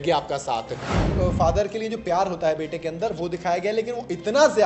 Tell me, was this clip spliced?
yes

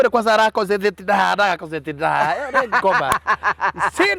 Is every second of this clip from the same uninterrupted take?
yes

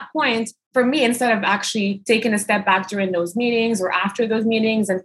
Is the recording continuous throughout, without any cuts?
no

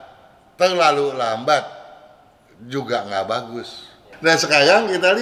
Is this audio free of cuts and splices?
no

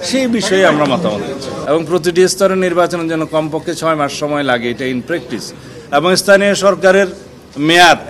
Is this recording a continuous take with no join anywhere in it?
no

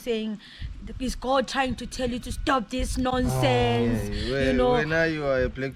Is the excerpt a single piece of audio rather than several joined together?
yes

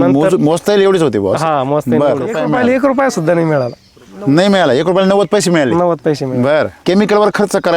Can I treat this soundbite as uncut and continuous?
no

